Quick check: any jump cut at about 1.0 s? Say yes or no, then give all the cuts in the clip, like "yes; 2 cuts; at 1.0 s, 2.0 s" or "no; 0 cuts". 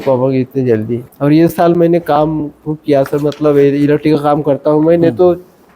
yes; 1 cut; at 1.0 s